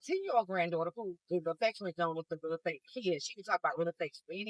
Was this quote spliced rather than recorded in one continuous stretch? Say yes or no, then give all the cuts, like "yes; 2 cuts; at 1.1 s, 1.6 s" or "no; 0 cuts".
no; 0 cuts